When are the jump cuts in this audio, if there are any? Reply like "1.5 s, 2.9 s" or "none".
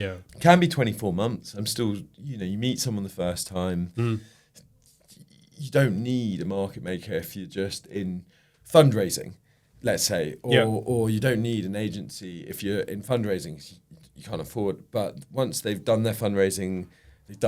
none

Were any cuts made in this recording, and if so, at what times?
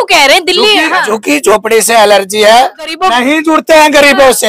3.0 s

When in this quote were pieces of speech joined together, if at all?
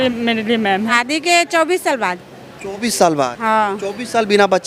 0.9 s

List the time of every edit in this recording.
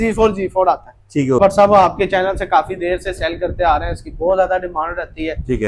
1.4 s

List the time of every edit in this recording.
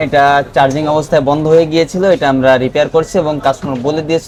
none

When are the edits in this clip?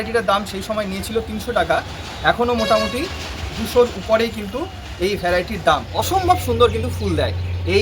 5.9 s

